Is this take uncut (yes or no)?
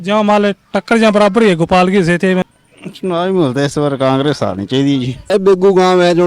no